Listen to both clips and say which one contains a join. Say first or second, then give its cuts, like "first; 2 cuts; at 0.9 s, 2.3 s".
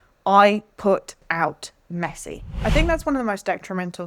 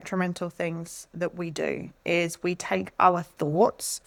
first; 1 cut; at 2.6 s